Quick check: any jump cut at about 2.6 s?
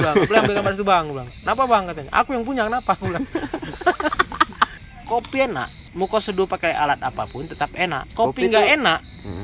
no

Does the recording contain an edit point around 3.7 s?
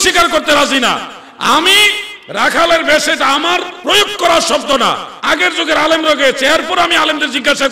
yes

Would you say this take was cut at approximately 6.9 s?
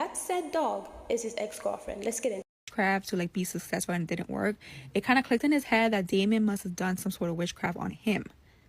no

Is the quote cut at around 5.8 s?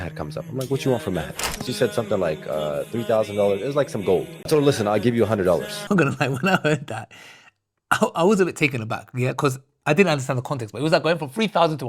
yes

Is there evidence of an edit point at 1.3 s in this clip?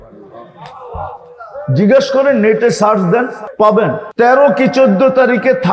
no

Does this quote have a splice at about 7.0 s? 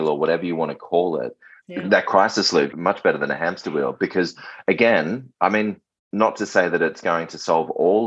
no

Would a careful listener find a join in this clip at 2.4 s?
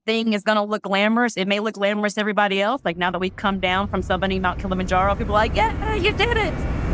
no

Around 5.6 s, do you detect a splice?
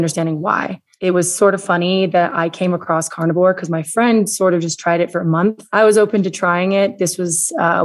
yes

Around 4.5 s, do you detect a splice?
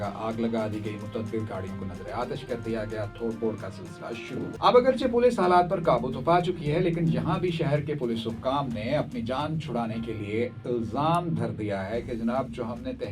yes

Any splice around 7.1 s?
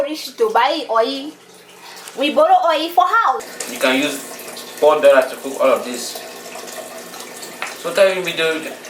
yes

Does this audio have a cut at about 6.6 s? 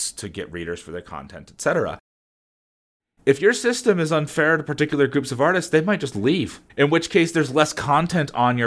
no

